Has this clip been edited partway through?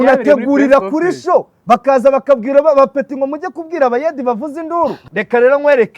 yes; 1 cut; at 5.0 s

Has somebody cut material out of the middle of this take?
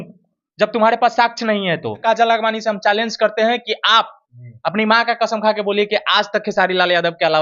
yes; 1 cut; at 2.0 s

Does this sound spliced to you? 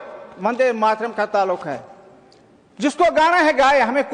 no; 0 cuts

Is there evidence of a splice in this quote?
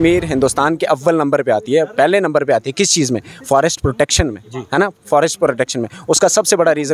no; 0 cuts

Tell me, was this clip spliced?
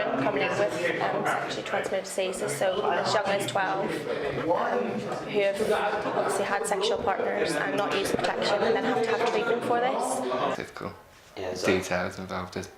yes; 1 cut; at 10.5 s

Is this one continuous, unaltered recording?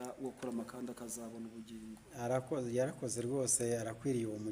yes; 0 cuts

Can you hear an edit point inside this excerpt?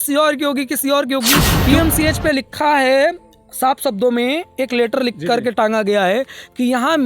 yes; 1 cut; at 1.5 s

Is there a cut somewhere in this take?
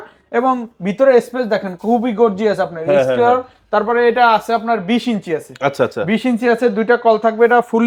no; 0 cuts

